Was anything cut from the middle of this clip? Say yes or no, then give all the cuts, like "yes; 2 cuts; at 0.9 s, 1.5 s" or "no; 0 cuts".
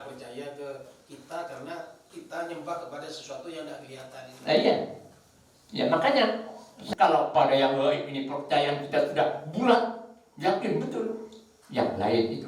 yes; 1 cut; at 6.8 s